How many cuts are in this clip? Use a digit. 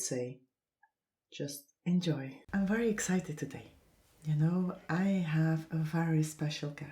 1